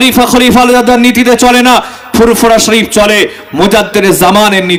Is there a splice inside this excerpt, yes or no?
no